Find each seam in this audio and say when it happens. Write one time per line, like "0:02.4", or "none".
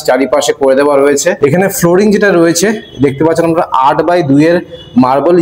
0:01.4

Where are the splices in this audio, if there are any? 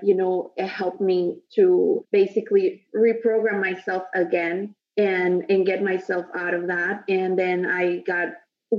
none

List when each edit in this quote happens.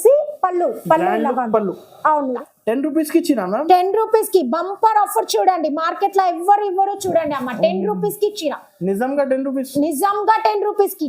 0:02.4

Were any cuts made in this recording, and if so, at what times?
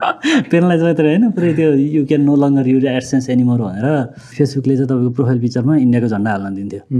0:04.3

